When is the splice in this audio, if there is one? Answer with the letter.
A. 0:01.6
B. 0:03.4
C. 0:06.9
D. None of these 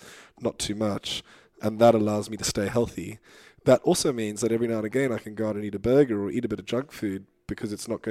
A